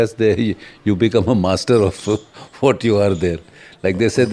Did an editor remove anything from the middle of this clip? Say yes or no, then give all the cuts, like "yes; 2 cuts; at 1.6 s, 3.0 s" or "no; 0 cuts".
no; 0 cuts